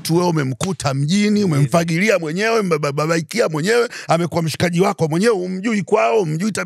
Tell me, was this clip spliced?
no; 0 cuts

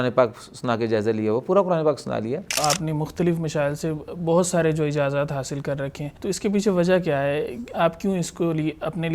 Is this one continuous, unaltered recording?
no; 2 cuts; at 2.6 s, 6.1 s

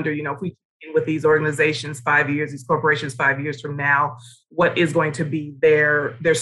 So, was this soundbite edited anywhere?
no; 0 cuts

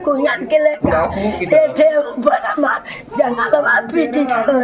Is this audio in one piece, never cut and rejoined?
yes; 0 cuts

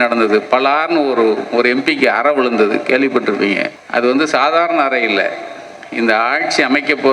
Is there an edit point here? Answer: yes; 1 cut; at 3.7 s

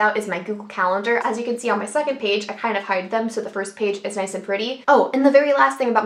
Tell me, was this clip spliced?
yes; 2 cuts; at 1.2 s, 4.8 s

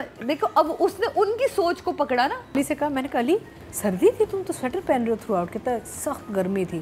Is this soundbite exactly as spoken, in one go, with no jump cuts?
no; 1 cut; at 2.5 s

